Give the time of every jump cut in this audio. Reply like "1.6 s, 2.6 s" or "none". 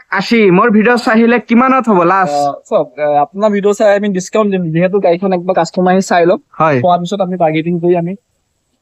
none